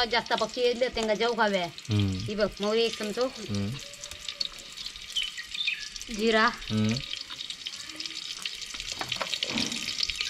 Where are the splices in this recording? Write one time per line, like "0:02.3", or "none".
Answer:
none

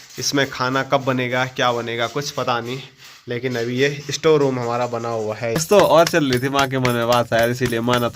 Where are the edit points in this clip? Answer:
0:05.6

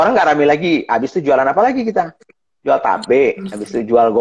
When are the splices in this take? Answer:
none

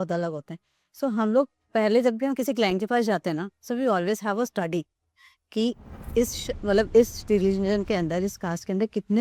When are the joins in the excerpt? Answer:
none

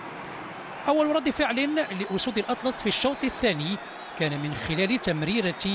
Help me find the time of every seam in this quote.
none

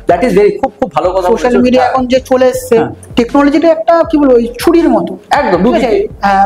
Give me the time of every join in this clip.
0:03.0

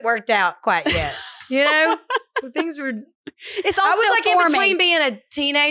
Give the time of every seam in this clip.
none

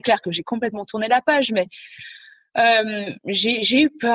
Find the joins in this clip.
none

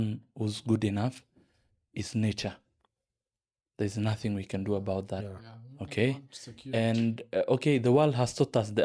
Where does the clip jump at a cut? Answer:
none

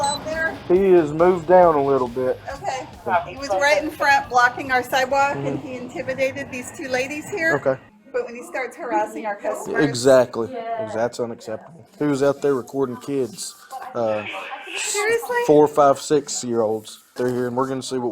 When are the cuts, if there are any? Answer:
0:07.9
0:11.9
0:17.1

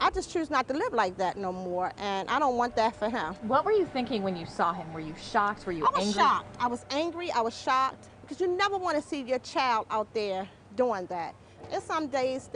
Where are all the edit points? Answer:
none

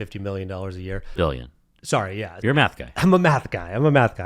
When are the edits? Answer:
0:01.1
0:02.4

